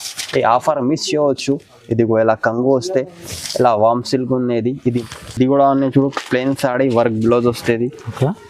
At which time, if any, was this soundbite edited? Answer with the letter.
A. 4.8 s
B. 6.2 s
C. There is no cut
A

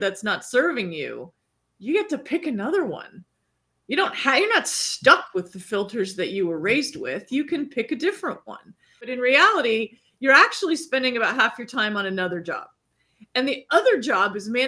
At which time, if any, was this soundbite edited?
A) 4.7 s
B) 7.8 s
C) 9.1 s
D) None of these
C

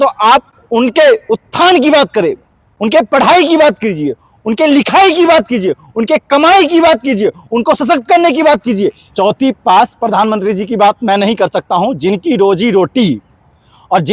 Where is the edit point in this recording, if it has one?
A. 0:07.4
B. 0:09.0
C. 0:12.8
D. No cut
B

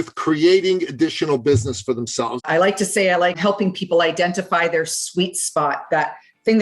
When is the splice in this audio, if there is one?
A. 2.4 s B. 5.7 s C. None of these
A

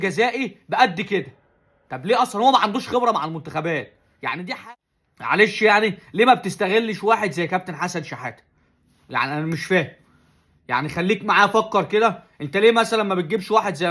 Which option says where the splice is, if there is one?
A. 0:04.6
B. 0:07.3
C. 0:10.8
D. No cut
A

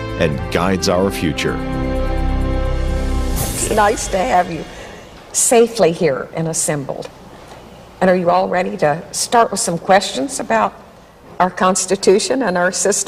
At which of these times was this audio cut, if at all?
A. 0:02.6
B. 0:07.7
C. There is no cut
A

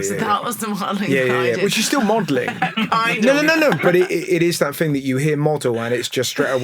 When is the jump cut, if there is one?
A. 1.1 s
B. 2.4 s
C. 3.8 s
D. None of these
C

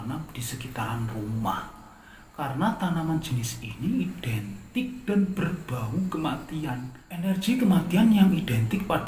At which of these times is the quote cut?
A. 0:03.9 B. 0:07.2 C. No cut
B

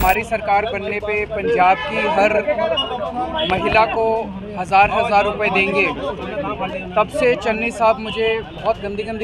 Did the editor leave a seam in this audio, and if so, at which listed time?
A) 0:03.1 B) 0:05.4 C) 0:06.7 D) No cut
D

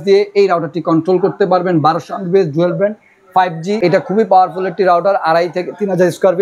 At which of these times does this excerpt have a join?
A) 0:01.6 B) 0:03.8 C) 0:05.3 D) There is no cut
B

